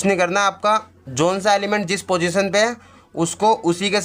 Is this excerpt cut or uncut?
cut